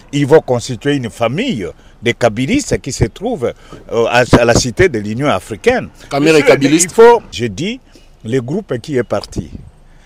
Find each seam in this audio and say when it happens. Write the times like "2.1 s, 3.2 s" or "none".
7.4 s

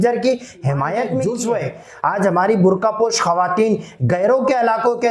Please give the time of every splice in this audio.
1.1 s

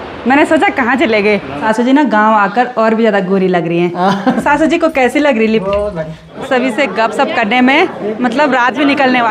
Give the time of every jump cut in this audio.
1.6 s, 4.4 s, 6.3 s

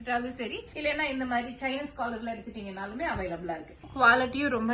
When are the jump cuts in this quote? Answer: 3.8 s

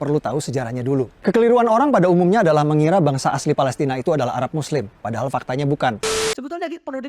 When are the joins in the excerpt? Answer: 6.1 s

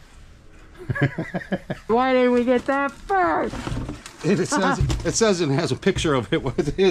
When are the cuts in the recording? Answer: 1.9 s

